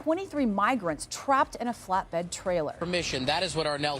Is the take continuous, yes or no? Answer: no